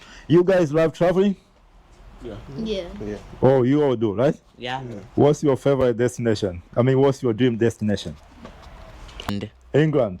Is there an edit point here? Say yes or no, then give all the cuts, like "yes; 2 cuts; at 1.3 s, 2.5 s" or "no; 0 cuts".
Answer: yes; 1 cut; at 9.3 s